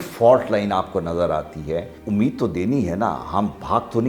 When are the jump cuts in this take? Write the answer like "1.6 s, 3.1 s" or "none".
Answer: 2.0 s